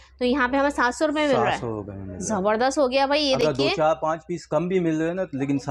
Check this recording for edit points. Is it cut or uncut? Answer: uncut